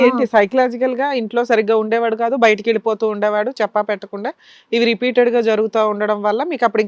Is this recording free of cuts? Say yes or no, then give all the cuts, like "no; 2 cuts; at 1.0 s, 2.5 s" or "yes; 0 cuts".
yes; 0 cuts